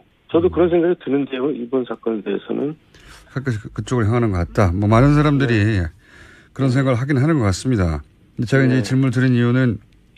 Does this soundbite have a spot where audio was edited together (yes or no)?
yes